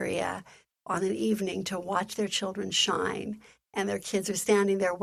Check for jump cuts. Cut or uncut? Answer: uncut